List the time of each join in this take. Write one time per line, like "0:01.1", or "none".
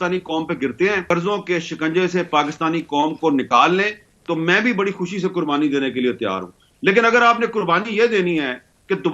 0:01.1